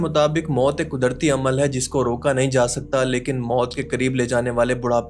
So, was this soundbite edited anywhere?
no; 0 cuts

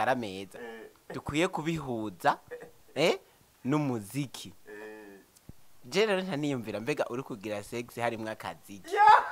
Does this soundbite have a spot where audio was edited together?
no; 0 cuts

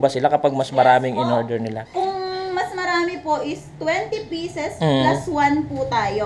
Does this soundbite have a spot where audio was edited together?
yes; 1 cut; at 1.8 s

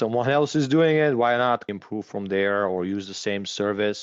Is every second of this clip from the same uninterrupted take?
yes; 0 cuts

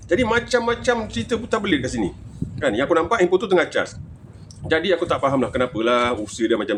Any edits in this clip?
no; 0 cuts

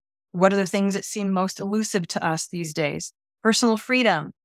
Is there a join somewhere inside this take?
no; 0 cuts

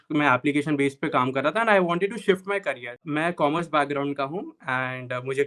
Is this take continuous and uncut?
no; 1 cut; at 3.0 s

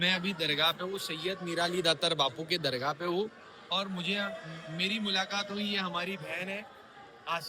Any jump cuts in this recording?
no; 0 cuts

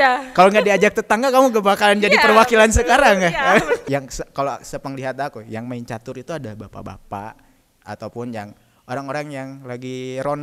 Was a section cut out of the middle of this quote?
yes; 1 cut; at 3.8 s

